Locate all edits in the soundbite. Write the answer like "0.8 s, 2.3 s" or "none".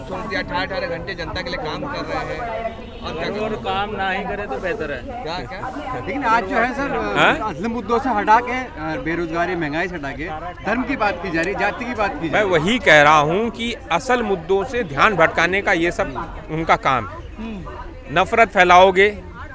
none